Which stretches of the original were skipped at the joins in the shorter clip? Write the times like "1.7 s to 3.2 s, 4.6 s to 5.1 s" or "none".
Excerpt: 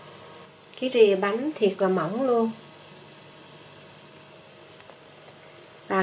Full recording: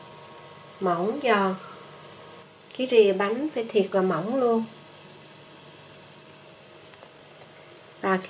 3.5 s to 3.7 s